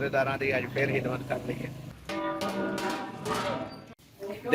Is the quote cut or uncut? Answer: cut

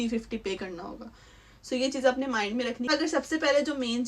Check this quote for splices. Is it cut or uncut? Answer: cut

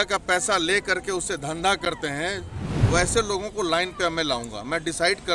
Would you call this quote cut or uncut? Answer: cut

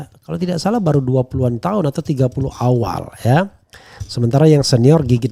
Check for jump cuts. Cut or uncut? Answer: uncut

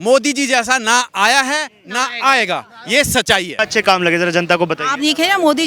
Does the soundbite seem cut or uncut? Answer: cut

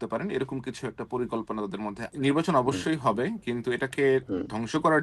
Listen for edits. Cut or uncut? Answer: cut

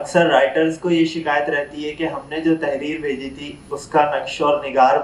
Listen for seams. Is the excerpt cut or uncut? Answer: uncut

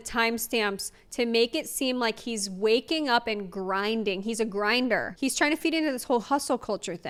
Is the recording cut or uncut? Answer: uncut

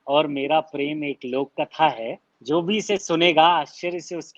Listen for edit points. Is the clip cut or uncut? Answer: cut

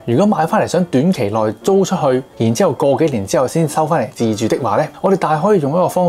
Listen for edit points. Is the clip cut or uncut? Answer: cut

